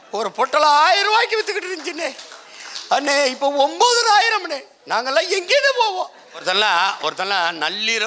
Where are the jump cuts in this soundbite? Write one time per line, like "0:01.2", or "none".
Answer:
0:06.4